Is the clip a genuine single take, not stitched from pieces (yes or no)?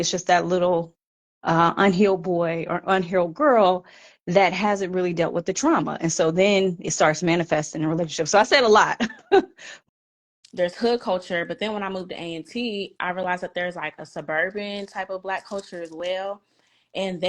no